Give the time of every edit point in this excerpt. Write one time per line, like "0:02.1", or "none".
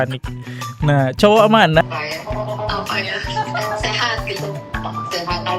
0:01.8